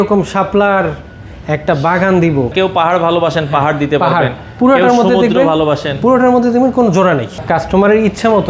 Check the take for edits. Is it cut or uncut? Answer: cut